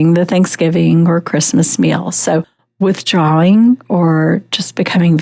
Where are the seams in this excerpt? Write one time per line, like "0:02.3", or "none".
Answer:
0:02.6